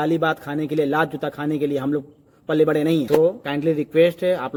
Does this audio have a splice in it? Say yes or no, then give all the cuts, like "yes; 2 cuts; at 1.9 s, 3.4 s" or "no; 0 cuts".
no; 0 cuts